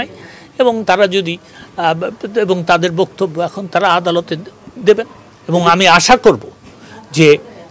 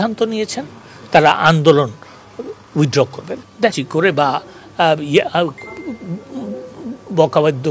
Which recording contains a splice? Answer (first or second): second